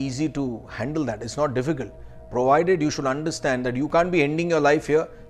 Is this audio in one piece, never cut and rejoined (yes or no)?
no